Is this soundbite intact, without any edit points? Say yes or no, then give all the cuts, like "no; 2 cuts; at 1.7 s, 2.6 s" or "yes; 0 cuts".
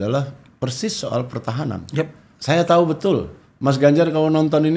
no; 1 cut; at 2.3 s